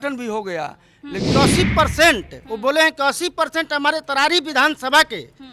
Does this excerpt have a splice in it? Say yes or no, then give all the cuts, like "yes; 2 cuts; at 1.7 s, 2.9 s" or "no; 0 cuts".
yes; 1 cut; at 1.3 s